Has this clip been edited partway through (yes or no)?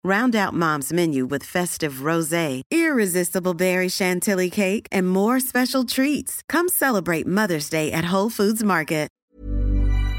yes